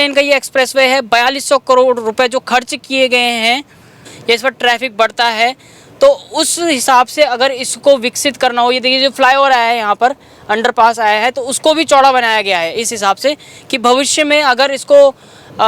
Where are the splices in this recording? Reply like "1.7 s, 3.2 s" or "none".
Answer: 4.1 s